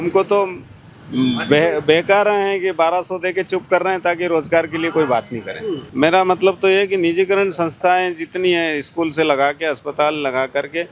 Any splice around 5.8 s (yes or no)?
yes